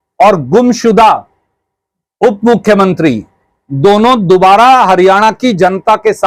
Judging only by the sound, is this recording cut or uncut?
uncut